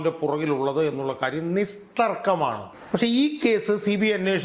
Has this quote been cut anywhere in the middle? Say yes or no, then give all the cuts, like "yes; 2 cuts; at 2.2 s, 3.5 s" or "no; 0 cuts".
yes; 1 cut; at 2.7 s